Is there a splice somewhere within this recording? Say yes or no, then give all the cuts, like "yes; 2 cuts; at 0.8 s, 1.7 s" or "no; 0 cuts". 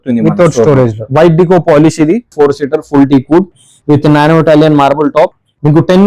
yes; 1 cut; at 2.3 s